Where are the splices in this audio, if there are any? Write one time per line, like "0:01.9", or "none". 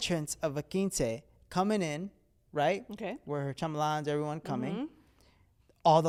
none